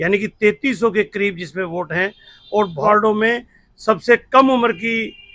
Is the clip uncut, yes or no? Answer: no